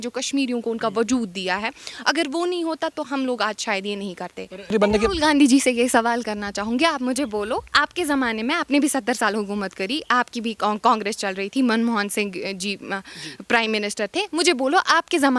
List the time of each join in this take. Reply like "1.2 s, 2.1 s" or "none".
4.7 s